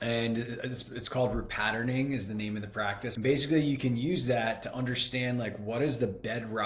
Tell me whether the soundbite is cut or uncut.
cut